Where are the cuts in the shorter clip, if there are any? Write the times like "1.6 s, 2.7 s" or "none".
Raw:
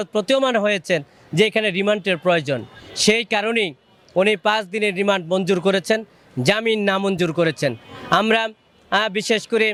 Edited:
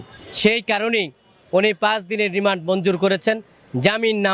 none